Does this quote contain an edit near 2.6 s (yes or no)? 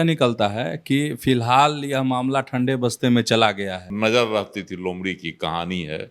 no